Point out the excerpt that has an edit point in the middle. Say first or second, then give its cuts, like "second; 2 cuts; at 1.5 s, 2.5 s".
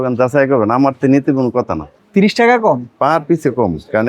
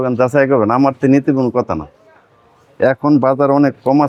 first; 1 cut; at 1.9 s